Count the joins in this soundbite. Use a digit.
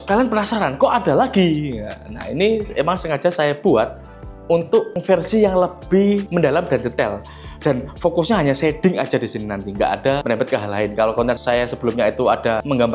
0